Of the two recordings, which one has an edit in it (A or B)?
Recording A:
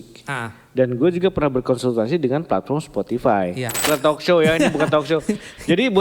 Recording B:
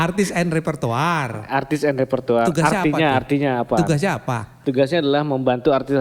A